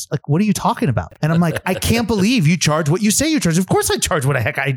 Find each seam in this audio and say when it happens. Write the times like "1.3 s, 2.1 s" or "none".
1.1 s